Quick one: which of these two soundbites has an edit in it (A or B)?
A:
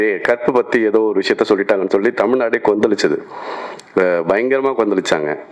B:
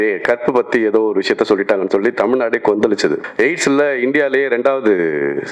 B